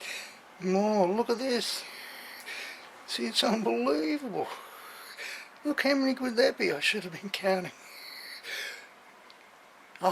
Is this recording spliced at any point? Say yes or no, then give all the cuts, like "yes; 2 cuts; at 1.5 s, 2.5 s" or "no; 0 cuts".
no; 0 cuts